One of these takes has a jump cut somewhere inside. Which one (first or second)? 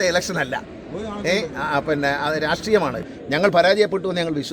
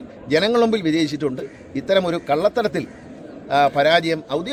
first